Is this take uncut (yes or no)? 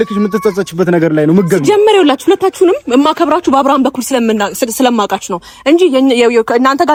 yes